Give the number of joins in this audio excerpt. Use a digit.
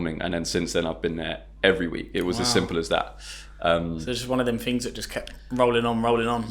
0